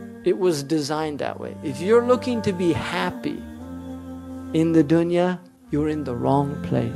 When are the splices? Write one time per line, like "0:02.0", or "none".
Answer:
0:05.5